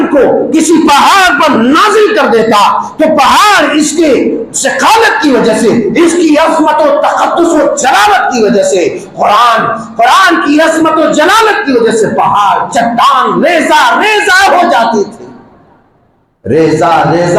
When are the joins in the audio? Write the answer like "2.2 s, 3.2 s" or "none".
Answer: none

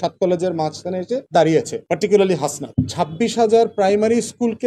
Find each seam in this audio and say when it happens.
2.7 s

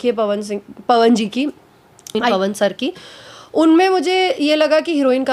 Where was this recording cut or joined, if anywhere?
2.3 s

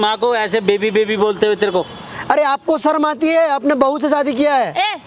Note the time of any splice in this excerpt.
none

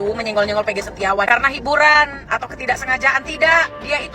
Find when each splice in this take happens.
none

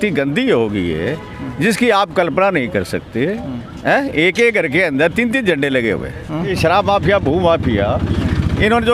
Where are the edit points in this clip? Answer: 6.5 s

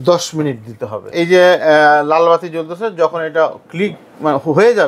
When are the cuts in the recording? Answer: 1.0 s

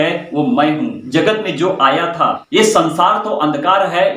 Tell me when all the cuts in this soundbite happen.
1.0 s, 2.4 s

